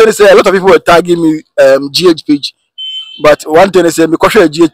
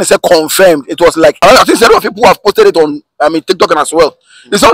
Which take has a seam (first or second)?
second